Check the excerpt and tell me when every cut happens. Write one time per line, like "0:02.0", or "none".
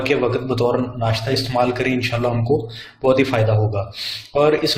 none